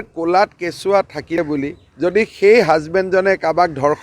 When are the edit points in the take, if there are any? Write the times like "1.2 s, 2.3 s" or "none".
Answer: 1.4 s

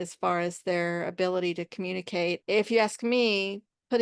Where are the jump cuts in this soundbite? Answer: 2.4 s

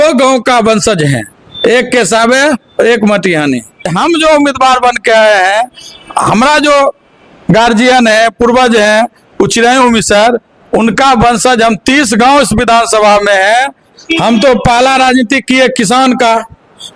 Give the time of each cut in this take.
3.9 s, 13.9 s

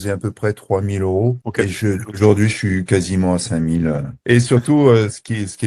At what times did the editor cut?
none

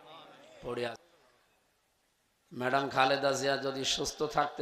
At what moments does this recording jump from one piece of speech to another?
1.0 s

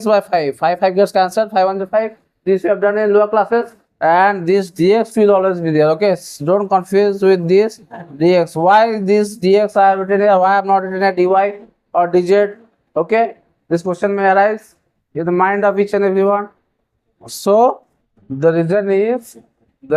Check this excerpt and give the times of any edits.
3.9 s

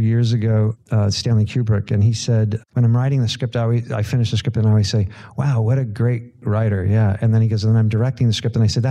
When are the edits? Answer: 0.8 s, 2.6 s, 6.4 s

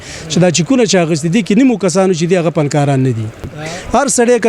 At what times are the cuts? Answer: 3.4 s

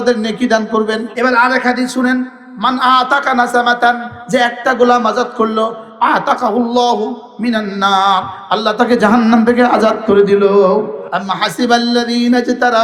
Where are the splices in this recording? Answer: 1.1 s, 11.0 s

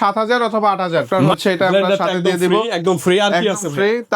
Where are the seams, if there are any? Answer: 1.2 s

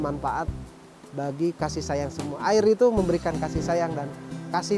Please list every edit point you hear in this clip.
none

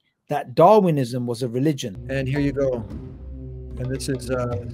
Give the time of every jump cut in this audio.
1.9 s

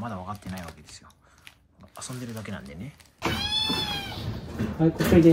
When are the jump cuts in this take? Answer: 3.2 s

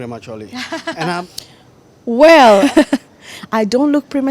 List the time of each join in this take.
1.1 s, 2.6 s

